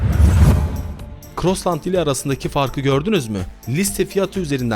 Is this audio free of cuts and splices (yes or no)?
no